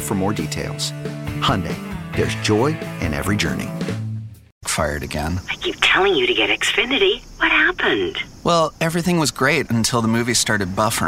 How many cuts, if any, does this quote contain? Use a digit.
1